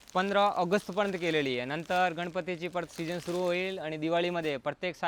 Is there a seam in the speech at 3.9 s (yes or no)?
no